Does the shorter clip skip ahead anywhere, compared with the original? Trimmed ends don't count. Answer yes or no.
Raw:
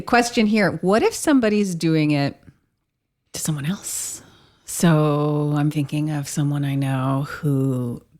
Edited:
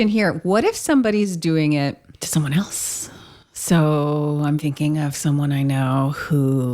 yes